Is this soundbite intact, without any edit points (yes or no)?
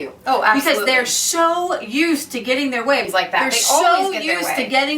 no